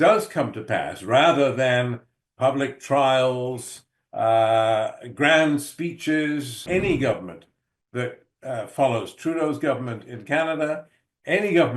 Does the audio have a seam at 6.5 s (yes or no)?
yes